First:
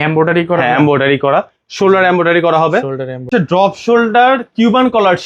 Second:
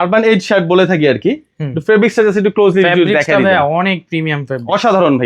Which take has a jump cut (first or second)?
first